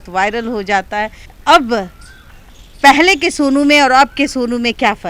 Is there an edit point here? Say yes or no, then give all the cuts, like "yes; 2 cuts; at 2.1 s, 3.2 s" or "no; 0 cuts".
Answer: no; 0 cuts